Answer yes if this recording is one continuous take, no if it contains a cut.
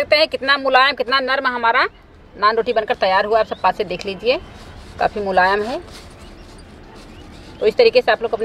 yes